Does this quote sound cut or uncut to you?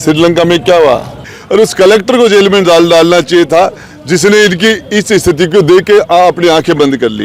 cut